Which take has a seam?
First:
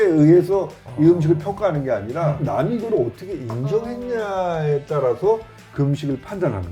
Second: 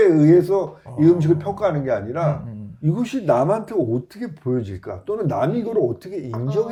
first; 1 cut; at 2.4 s

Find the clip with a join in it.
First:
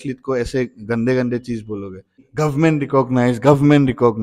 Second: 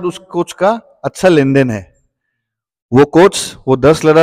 first; 1 cut; at 2.2 s

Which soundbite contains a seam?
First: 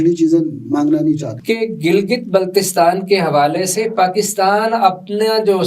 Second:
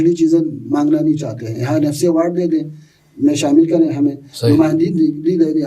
first; 1 cut; at 1.3 s

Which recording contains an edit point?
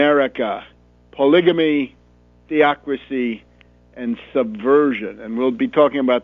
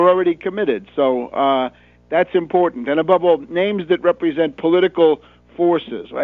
first; 1 cut; at 3.5 s

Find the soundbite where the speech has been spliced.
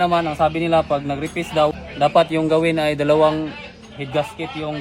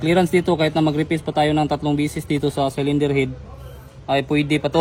first; 1 cut; at 1.8 s

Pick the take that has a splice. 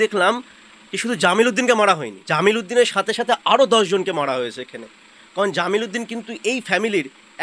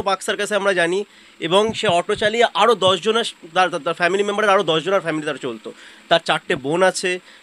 first; 1 cut; at 2.1 s

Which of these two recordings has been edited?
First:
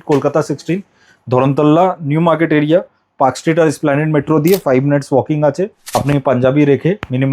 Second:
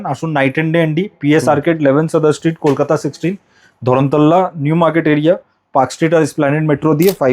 first; 1 cut; at 6.0 s

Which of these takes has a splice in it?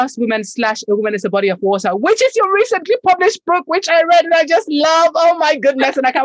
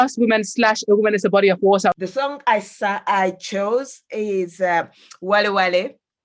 second; 1 cut; at 1.9 s

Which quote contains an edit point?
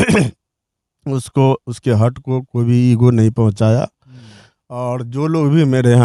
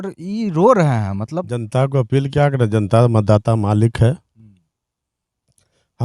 second; 1 cut; at 1.5 s

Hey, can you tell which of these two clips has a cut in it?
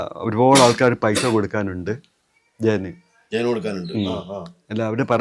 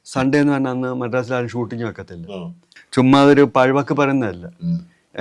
second; 1 cut; at 2.7 s

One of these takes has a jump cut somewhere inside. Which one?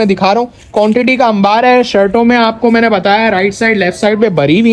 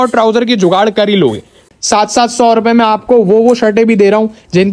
second; 1 cut; at 1.6 s

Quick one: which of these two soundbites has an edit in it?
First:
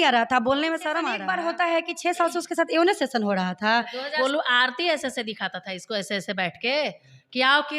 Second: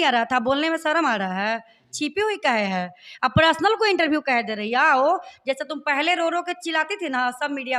first; 2 cuts; at 1.2 s, 4.1 s

